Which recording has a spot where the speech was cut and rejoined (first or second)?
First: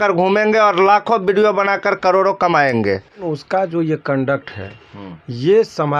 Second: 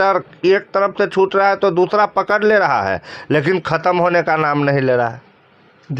first